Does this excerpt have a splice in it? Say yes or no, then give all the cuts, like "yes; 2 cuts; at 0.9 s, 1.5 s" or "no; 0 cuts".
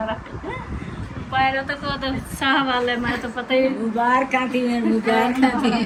no; 0 cuts